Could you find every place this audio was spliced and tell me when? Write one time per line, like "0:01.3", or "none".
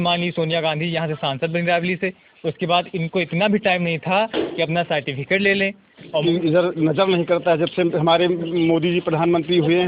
0:06.2